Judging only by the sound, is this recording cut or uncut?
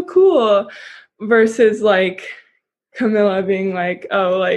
uncut